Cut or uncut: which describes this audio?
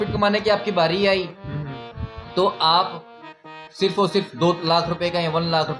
uncut